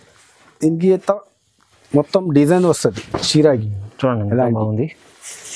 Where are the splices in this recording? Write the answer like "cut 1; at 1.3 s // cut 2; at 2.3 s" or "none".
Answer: none